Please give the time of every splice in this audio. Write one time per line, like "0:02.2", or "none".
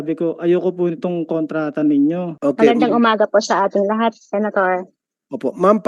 0:02.3